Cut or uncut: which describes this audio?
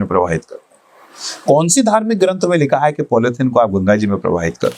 uncut